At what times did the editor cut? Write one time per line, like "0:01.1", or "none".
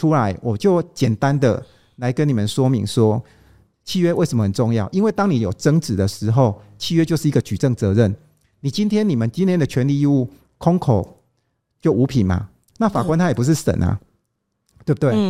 none